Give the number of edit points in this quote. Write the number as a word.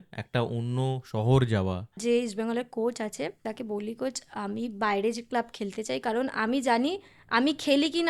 two